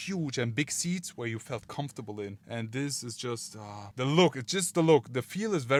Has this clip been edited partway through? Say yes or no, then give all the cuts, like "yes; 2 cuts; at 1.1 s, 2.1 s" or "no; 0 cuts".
no; 0 cuts